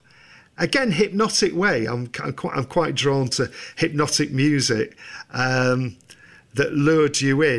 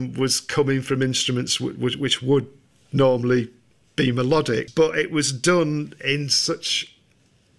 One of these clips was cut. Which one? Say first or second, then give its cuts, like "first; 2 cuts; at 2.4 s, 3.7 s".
second; 1 cut; at 4.7 s